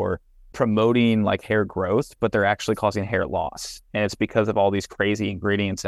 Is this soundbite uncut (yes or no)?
yes